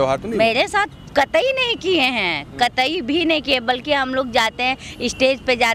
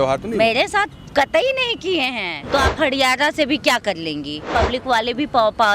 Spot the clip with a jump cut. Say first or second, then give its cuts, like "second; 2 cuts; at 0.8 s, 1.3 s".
second; 2 cuts; at 2.3 s, 4.5 s